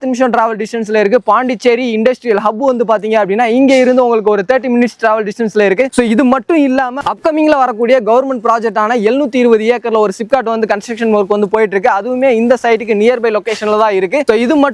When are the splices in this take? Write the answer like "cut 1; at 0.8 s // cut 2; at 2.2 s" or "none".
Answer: none